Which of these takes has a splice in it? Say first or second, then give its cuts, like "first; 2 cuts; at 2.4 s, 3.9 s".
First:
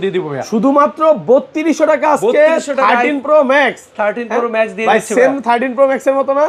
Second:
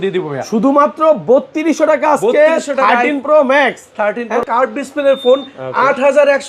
second; 1 cut; at 4.4 s